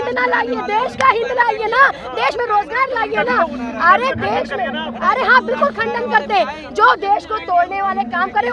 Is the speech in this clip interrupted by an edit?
no; 0 cuts

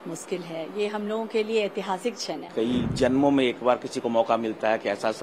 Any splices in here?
yes; 1 cut; at 2.5 s

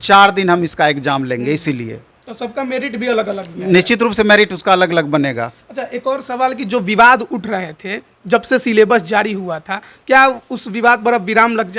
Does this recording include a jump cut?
no; 0 cuts

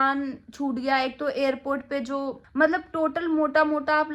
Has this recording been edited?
yes; 1 cut; at 2.4 s

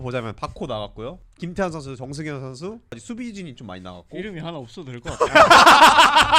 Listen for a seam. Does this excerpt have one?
yes; 2 cuts; at 1.3 s, 3.0 s

